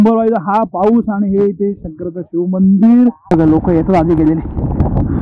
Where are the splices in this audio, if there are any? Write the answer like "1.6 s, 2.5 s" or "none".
3.2 s

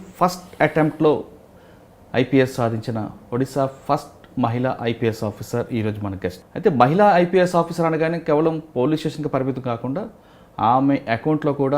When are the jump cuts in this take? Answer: 6.4 s

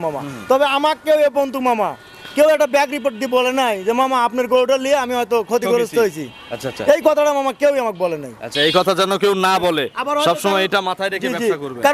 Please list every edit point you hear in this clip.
none

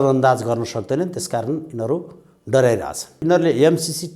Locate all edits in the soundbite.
3.2 s

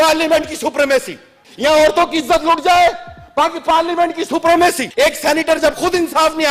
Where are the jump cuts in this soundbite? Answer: 4.9 s

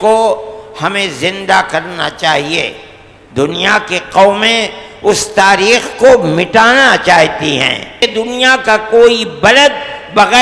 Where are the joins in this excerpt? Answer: 8.0 s

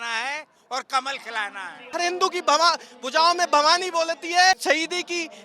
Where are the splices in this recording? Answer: 1.9 s, 4.6 s

